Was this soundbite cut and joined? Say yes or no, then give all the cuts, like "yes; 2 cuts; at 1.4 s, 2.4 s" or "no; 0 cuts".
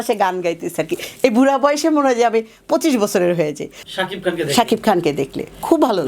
yes; 1 cut; at 3.7 s